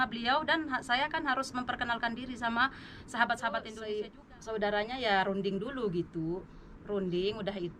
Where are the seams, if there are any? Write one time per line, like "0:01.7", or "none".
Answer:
0:03.7

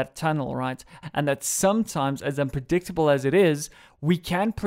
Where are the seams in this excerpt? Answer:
0:01.0

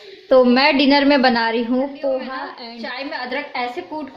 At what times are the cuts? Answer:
0:02.5

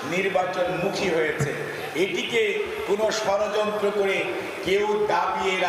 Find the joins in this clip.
none

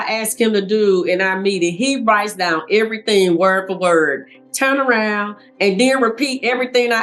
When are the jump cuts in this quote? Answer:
none

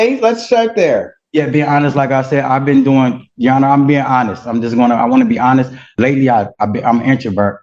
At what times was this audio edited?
0:05.9

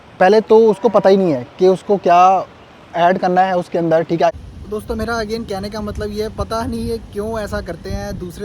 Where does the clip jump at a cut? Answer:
0:04.4

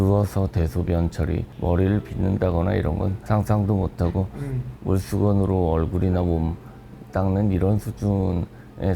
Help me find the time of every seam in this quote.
0:01.5
0:03.2

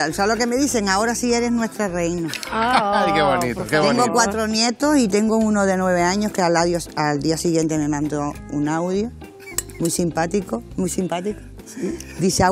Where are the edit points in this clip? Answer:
none

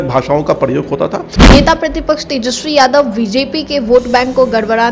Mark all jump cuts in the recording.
0:01.5

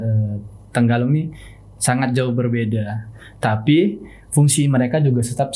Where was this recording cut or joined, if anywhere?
none

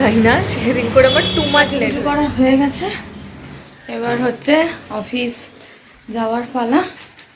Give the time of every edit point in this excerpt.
0:01.8

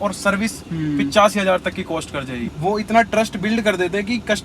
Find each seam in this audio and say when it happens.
0:02.4

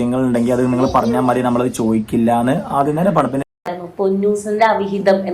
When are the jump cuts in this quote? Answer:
0:03.4

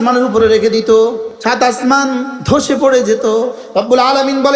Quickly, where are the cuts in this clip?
0:01.3
0:02.4
0:03.6

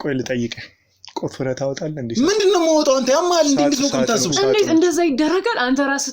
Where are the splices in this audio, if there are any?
none

